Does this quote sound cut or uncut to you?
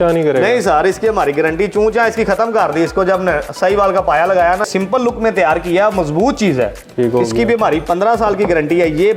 cut